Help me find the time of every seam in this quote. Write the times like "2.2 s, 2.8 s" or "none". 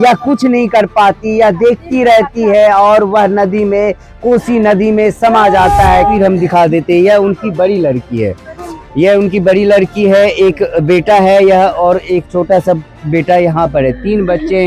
6.1 s